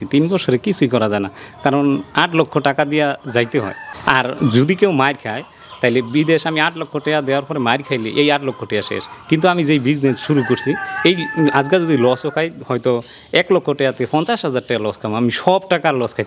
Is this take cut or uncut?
cut